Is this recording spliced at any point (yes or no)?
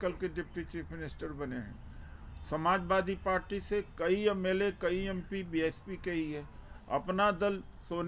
no